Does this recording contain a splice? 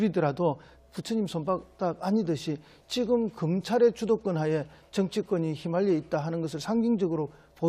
no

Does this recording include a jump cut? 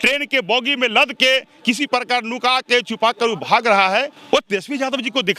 yes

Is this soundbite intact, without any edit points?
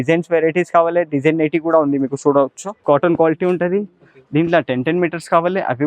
no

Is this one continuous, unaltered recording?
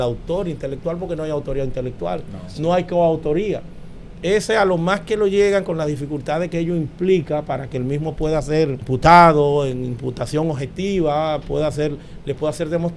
no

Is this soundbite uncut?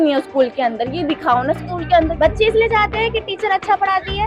no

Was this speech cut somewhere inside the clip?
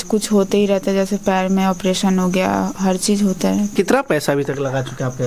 yes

